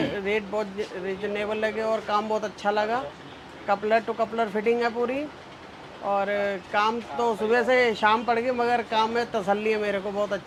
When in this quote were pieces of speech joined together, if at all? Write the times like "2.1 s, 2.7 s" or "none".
none